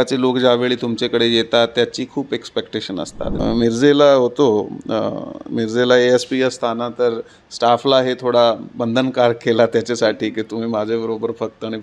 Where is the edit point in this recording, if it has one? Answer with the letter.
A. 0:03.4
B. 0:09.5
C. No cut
A